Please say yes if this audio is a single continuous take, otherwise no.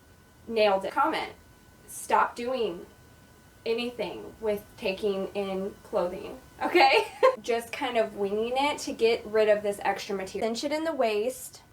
no